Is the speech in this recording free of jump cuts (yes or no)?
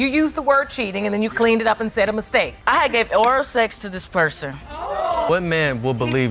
yes